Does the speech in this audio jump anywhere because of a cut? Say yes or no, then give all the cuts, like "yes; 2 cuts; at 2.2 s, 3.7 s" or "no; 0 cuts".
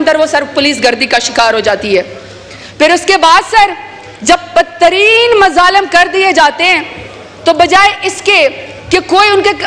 no; 0 cuts